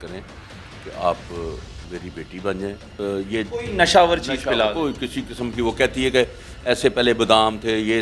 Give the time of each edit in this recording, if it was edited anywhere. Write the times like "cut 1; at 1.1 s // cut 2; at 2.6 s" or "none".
cut 1; at 2.9 s